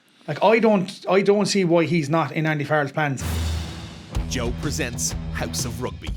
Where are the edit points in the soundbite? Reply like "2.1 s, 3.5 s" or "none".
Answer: 3.2 s